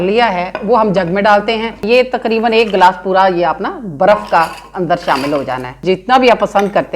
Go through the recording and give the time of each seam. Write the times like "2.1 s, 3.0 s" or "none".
1.8 s, 5.8 s